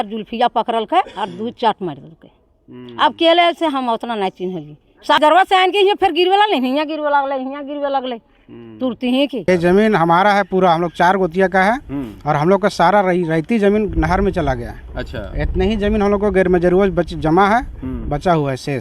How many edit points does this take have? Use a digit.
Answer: 2